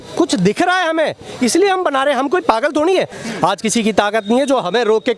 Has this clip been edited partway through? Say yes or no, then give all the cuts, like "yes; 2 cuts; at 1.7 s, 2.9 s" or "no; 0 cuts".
yes; 1 cut; at 3.2 s